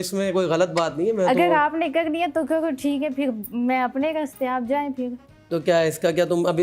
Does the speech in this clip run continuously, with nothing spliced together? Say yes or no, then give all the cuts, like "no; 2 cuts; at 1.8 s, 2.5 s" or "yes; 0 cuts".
yes; 0 cuts